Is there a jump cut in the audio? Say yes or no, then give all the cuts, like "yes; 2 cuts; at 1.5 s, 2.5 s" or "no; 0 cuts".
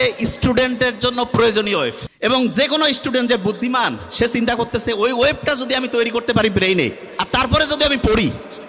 yes; 1 cut; at 2.1 s